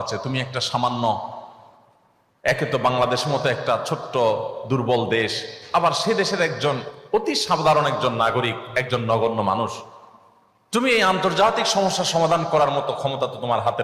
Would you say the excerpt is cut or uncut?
uncut